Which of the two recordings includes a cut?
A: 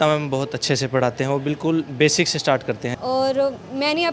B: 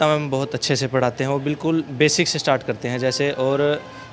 A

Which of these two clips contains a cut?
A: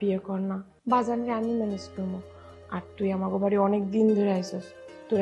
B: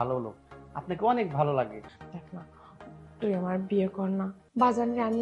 B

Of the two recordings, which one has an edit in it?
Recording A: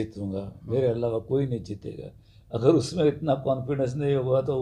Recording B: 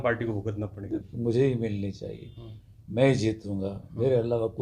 B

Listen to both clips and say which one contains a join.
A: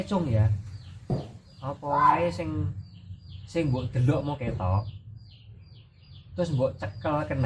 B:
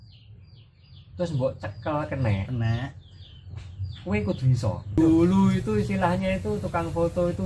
B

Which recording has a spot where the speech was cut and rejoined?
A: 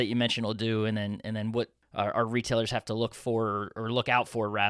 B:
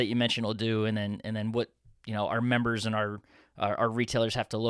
A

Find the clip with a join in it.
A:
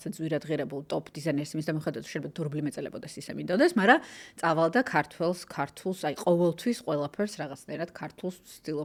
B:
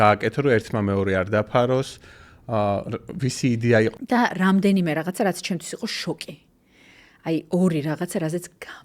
B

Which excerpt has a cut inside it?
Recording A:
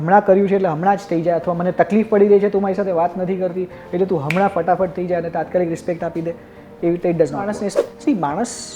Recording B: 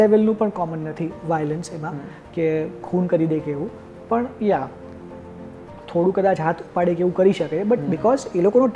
A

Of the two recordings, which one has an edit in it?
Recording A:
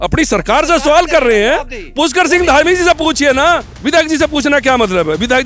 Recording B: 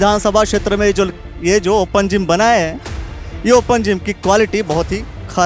A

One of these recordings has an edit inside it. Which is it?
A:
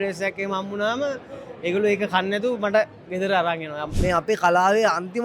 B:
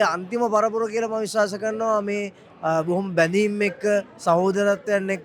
A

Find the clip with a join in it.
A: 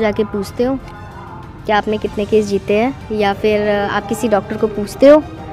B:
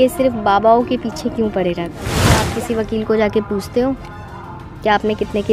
B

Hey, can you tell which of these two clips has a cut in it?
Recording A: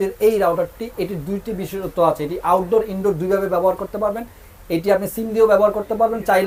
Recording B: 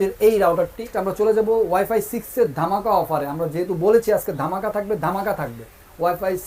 B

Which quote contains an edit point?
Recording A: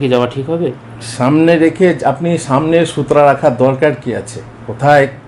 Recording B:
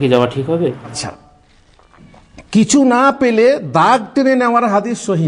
B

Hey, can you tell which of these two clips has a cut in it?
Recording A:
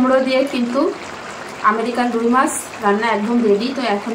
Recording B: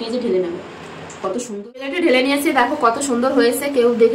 B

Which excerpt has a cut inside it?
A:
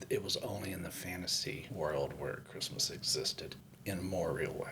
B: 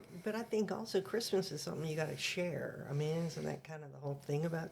A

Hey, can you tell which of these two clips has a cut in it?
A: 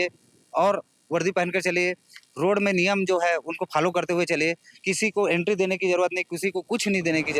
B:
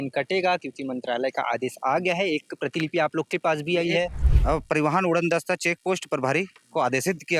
B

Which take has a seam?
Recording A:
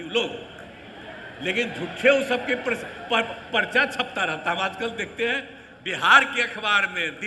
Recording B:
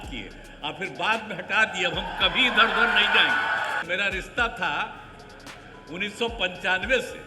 B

